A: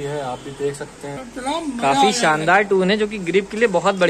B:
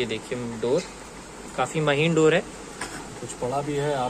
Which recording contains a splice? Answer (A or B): A